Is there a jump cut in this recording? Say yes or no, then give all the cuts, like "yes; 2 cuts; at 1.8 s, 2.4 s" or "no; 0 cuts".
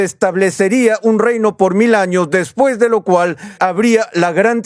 no; 0 cuts